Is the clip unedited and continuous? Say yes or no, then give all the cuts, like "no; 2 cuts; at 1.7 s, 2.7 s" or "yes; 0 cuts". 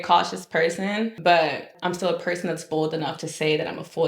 no; 2 cuts; at 1.1 s, 1.7 s